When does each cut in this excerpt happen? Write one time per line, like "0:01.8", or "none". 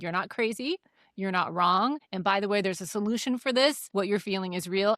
0:02.1
0:03.8